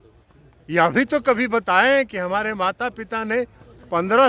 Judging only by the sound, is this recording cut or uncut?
uncut